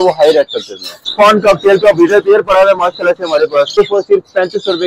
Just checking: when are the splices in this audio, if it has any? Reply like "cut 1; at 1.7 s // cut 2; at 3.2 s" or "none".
cut 1; at 1.1 s // cut 2; at 3.8 s